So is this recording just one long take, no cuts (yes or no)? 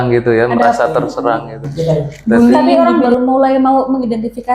no